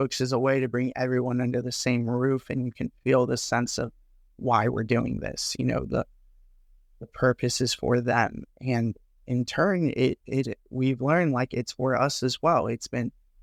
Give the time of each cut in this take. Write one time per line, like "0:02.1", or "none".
none